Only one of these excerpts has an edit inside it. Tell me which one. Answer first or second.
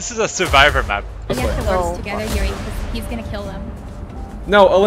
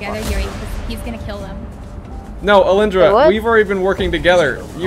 first